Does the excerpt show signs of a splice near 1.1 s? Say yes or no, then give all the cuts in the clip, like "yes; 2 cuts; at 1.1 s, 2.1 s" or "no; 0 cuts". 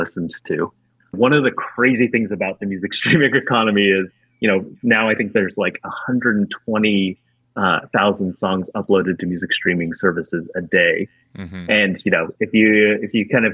yes; 1 cut; at 1.1 s